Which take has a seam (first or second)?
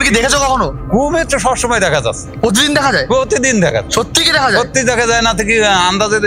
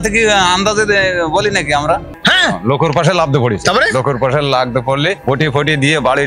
second